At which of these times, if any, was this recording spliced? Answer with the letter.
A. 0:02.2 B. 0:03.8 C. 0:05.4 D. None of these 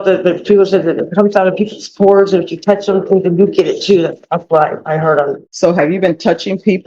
C